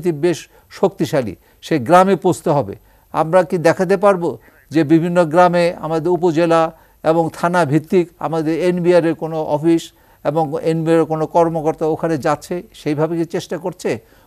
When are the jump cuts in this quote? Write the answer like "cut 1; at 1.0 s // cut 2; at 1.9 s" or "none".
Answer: none